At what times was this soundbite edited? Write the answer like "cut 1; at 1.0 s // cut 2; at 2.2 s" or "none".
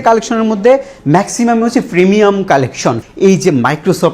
cut 1; at 3.0 s